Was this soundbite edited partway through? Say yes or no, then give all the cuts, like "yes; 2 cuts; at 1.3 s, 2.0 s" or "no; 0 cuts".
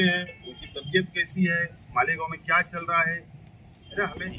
no; 0 cuts